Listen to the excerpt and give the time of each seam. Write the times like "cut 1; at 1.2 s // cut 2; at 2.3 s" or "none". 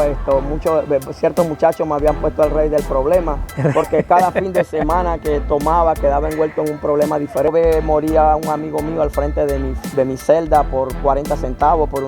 cut 1; at 7.5 s